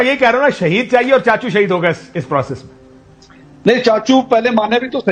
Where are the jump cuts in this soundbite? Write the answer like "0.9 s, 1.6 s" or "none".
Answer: none